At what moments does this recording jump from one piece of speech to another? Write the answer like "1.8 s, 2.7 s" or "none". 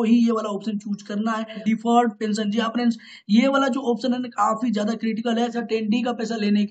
1.6 s, 5.6 s